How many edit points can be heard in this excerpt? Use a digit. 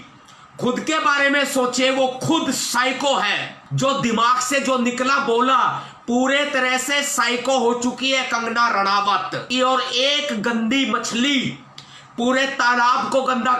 2